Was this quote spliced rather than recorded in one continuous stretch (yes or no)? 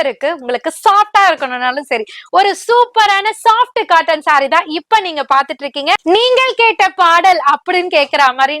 yes